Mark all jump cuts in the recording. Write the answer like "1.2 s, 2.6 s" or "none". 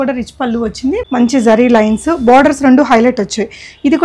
1.0 s

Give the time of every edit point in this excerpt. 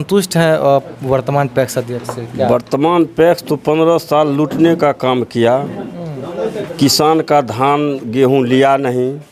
none

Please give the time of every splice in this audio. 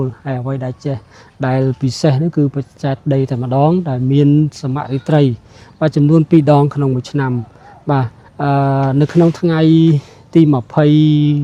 none

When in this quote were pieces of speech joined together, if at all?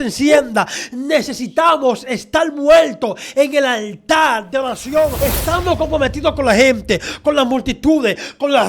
5.2 s

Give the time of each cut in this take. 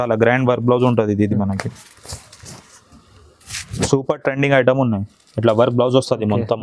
none

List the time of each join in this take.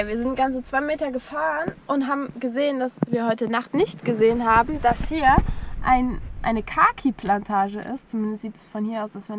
none

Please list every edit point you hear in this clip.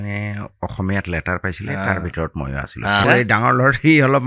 3.0 s

